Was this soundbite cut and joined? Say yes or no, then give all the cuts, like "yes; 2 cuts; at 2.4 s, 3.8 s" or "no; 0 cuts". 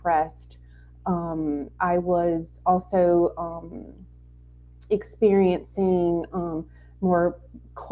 no; 0 cuts